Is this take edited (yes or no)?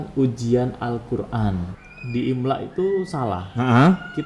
yes